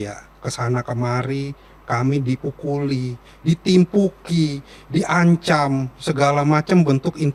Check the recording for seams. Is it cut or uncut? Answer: uncut